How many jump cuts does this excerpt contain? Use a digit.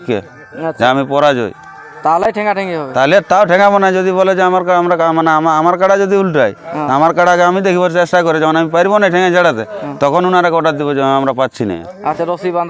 0